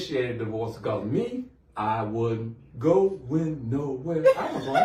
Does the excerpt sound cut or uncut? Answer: uncut